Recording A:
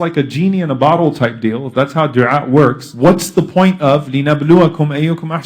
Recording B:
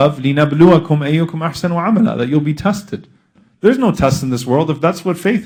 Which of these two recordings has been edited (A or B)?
A